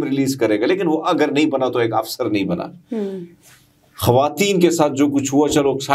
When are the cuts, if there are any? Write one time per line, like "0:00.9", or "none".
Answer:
none